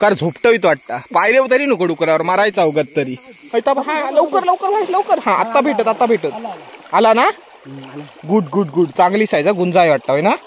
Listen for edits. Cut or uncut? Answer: cut